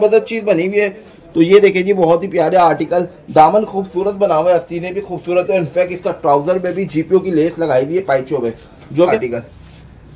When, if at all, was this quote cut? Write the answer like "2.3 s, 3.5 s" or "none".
1.0 s, 9.1 s